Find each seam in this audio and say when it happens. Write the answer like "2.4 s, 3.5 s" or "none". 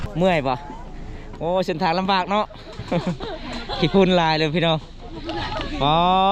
none